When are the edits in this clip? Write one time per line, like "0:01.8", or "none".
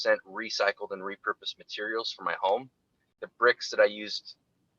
0:03.2